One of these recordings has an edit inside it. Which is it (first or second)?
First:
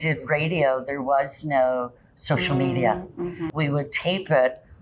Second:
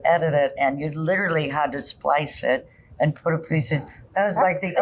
first